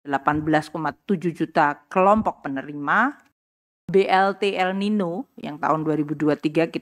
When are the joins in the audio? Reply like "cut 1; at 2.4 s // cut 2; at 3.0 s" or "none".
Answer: none

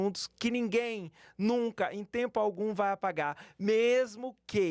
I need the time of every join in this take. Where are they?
none

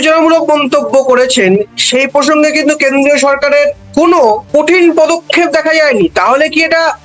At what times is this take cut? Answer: none

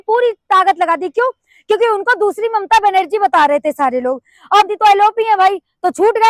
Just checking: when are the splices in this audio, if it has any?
cut 1; at 4.7 s

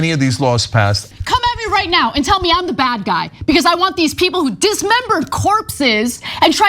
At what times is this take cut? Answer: cut 1; at 1.1 s

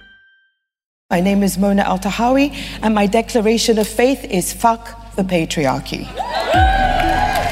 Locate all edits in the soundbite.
cut 1; at 1.1 s

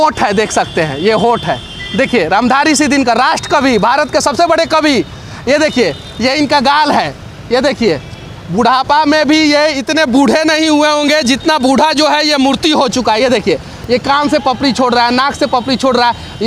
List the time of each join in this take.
none

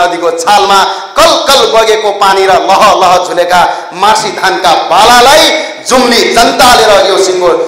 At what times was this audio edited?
none

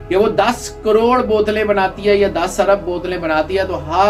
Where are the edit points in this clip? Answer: none

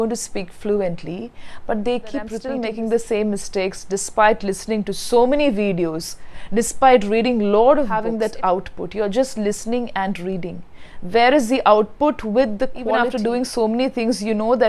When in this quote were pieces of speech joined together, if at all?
cut 1; at 2.4 s // cut 2; at 8.0 s // cut 3; at 13.0 s

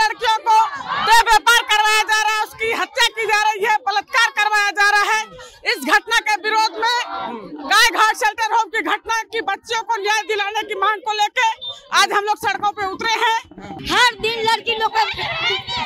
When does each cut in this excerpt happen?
cut 1; at 13.7 s

